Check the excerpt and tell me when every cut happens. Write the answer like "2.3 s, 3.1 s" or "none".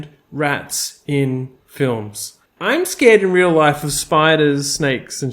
2.3 s